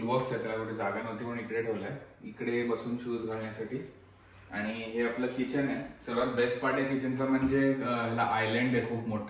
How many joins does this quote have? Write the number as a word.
zero